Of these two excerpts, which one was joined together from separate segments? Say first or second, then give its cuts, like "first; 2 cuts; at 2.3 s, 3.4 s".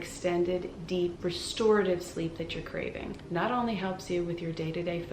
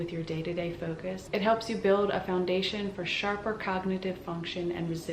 first; 1 cut; at 3.2 s